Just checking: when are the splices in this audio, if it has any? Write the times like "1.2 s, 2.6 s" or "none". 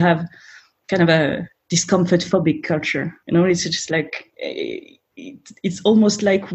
3.3 s, 4.2 s